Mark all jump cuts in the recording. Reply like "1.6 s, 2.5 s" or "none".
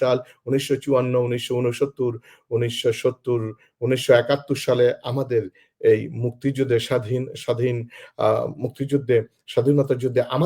none

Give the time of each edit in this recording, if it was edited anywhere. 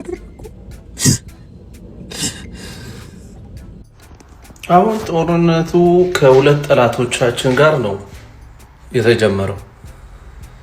3.9 s

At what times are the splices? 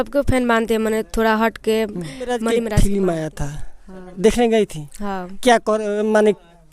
2.6 s

